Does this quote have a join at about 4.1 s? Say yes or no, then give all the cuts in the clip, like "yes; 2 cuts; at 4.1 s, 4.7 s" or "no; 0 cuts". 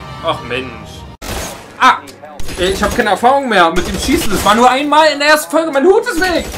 no; 1 cut; at 1.3 s